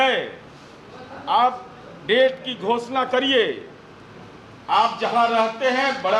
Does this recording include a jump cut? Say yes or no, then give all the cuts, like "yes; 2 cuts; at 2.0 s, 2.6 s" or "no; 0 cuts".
no; 0 cuts